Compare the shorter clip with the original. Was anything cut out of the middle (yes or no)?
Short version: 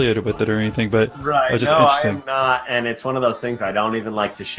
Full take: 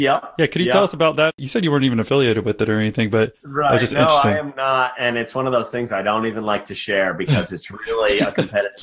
yes